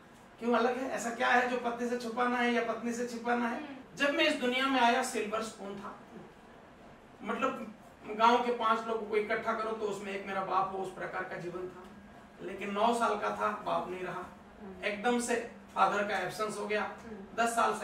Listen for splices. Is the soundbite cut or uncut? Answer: cut